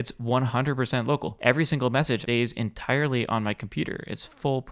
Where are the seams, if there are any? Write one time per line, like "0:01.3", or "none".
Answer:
0:01.3
0:02.2